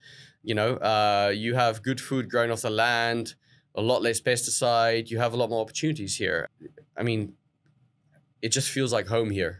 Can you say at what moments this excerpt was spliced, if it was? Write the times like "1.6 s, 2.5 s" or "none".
6.4 s